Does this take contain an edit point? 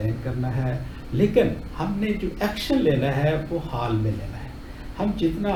no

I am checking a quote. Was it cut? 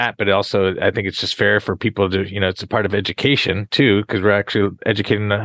no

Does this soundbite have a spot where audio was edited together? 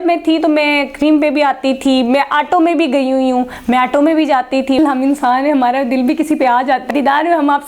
yes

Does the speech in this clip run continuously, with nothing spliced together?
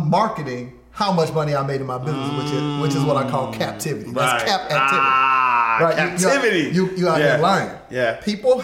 yes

